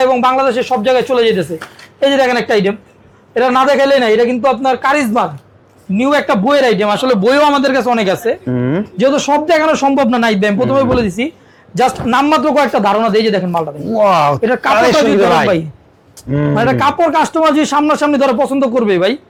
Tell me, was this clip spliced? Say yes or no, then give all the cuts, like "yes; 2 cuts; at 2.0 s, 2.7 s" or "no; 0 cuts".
no; 0 cuts